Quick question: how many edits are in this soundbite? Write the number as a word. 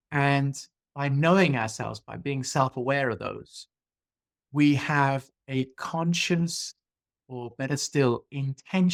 zero